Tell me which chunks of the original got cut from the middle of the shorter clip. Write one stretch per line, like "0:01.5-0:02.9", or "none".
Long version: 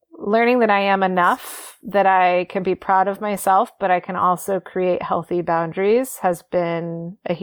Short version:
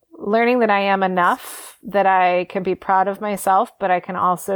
none